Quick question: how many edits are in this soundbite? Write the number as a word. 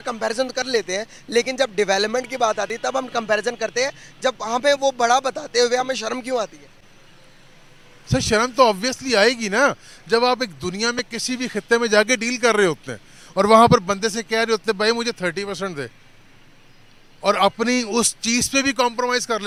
zero